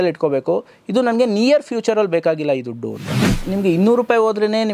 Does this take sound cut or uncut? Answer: cut